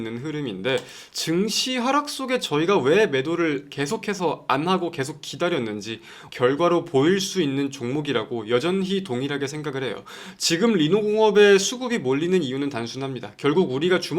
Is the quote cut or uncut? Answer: cut